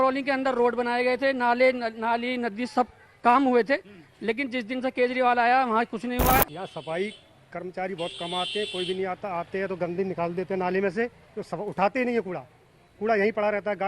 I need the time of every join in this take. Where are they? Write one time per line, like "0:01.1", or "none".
0:06.5